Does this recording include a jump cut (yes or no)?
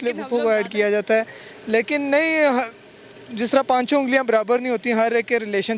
no